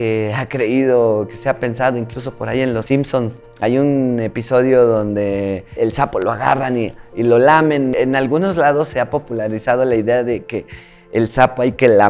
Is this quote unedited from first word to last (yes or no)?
yes